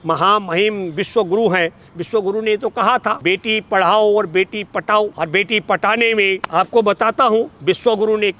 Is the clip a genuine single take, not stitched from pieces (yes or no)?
no